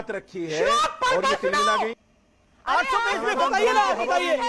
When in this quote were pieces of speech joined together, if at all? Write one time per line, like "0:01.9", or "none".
0:01.9